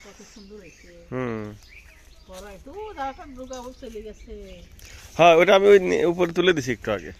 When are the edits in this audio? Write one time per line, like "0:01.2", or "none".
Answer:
none